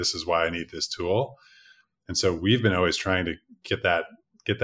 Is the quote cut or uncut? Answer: uncut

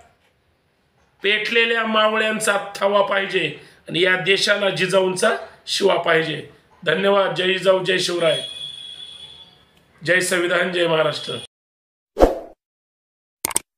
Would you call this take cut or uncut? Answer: uncut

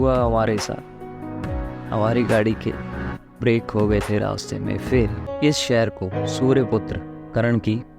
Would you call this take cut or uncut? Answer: cut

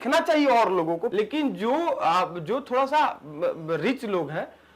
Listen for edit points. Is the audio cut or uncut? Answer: cut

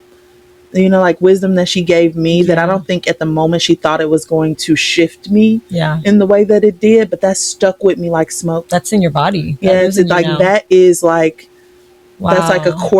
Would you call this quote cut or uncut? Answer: uncut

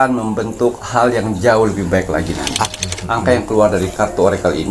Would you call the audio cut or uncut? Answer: cut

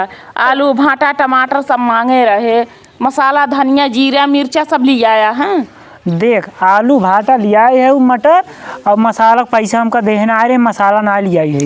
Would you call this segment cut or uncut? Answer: uncut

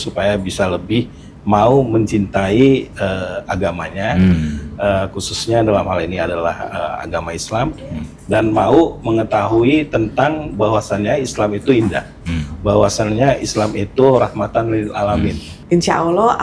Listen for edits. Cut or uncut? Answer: cut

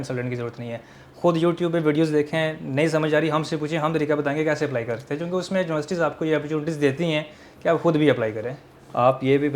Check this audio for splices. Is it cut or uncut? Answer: uncut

